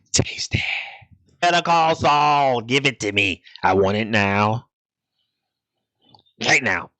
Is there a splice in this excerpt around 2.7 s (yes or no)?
no